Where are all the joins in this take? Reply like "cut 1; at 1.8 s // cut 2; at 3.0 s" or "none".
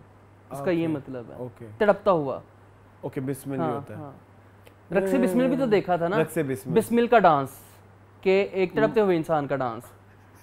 none